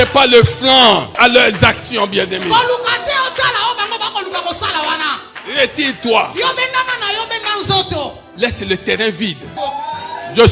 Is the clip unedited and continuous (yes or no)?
no